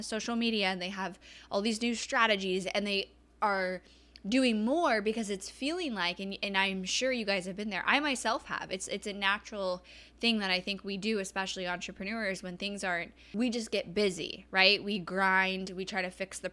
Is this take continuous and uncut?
no; 1 cut; at 13.2 s

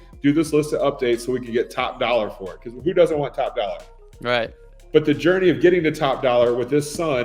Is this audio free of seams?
yes; 0 cuts

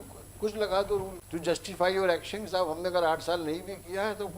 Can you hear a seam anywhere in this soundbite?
yes; 1 cut; at 1.2 s

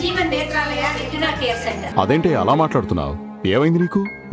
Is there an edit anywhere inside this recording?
yes; 1 cut; at 1.9 s

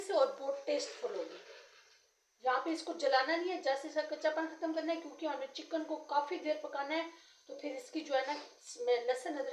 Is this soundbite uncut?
yes; 0 cuts

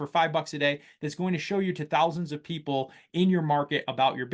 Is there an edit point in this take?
no; 0 cuts

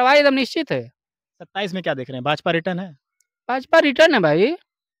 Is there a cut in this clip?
no; 0 cuts

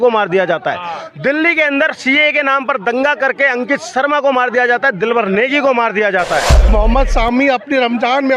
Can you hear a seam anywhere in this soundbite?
yes; 1 cut; at 6.7 s

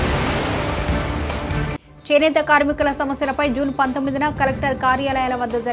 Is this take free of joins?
no; 1 cut; at 1.4 s

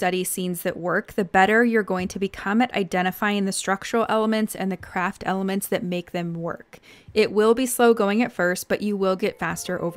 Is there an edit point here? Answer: no; 0 cuts

